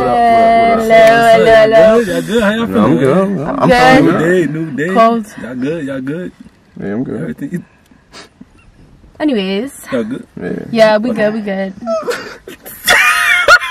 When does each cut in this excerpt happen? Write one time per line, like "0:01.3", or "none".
none